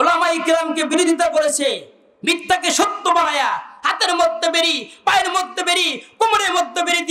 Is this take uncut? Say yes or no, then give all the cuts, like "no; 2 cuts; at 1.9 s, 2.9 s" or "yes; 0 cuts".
yes; 0 cuts